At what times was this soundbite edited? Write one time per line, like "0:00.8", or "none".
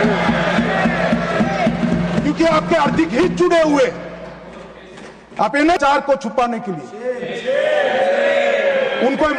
0:05.8

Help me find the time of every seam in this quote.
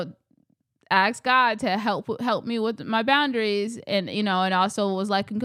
none

